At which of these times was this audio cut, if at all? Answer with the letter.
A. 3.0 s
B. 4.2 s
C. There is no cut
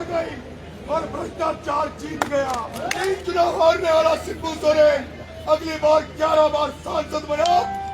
A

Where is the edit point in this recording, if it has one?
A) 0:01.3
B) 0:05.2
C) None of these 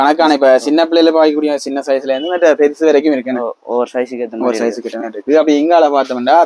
C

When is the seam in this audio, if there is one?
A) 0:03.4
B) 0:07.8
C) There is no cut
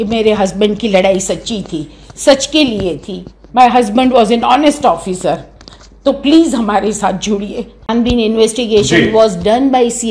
B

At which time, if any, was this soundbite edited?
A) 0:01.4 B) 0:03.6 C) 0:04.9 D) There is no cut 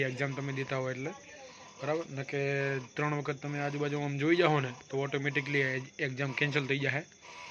D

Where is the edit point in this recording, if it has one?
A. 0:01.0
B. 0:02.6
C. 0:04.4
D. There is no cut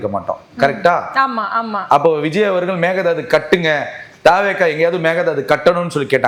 D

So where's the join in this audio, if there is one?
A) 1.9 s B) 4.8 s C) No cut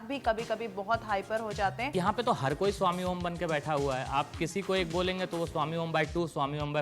A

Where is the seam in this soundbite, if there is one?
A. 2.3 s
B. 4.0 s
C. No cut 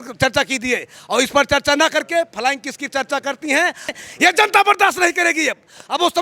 B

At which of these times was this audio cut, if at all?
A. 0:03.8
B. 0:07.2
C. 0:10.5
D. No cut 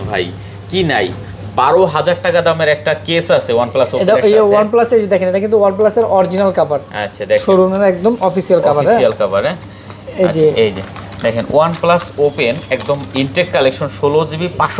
D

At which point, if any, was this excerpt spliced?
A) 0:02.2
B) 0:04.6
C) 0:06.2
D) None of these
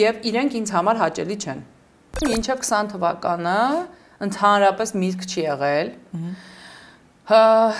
A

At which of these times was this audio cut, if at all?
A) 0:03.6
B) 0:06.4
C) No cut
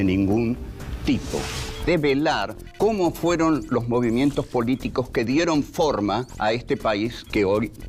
A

